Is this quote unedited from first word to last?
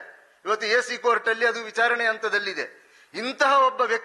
yes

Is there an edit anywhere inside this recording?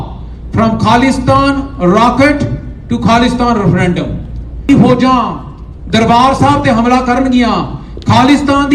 yes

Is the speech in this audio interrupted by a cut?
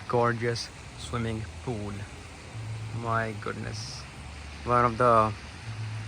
no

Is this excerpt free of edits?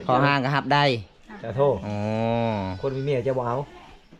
yes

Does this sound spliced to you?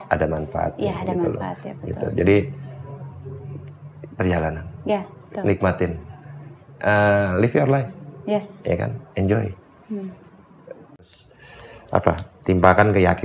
yes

